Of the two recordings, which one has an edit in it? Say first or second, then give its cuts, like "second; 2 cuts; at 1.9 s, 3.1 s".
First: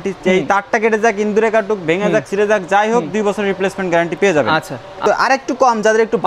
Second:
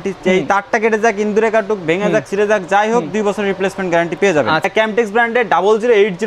second; 1 cut; at 4.7 s